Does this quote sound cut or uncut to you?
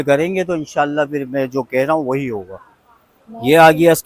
uncut